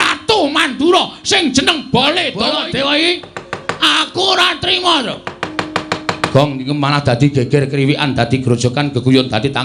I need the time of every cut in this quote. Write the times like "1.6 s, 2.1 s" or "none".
2.5 s